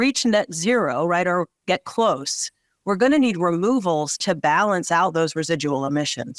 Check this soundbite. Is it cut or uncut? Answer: uncut